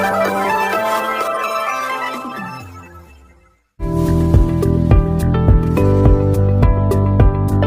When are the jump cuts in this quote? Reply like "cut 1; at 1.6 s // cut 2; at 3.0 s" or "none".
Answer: cut 1; at 3.5 s